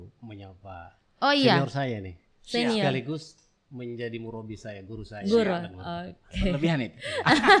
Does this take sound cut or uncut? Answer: uncut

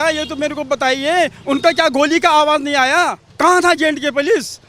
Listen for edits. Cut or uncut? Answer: cut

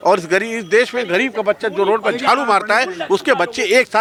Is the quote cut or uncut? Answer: uncut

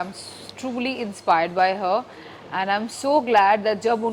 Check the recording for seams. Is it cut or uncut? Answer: uncut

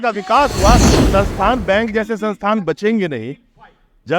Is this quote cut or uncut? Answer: cut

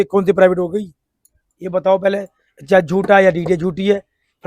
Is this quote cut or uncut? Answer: uncut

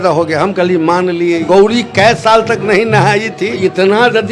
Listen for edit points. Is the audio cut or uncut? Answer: cut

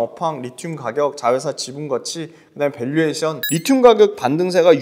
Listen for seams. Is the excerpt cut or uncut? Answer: cut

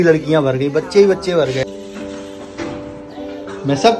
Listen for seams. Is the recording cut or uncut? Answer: cut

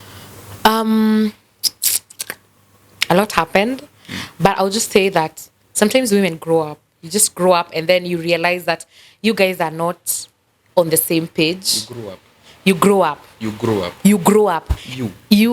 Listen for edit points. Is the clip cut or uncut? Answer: uncut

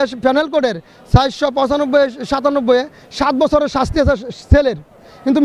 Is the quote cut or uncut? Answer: uncut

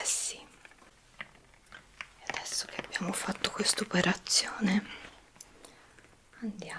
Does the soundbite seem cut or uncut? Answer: cut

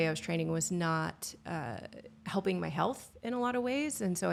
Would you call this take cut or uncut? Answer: uncut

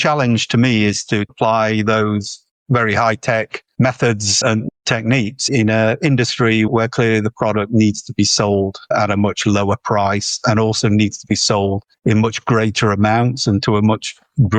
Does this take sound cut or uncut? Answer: uncut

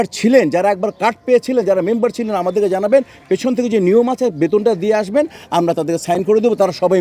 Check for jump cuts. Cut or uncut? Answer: uncut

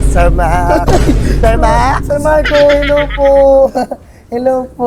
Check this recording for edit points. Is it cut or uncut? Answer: uncut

